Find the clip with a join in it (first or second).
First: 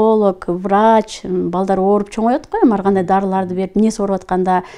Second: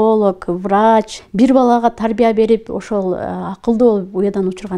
second